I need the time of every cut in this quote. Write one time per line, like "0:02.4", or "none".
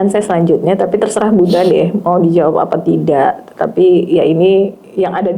none